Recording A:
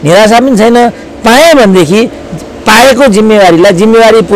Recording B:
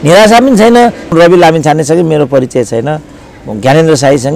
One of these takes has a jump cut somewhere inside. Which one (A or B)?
B